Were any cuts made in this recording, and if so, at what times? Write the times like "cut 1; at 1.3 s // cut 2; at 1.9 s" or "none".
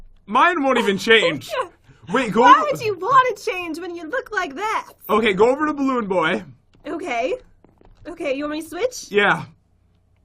cut 1; at 3.6 s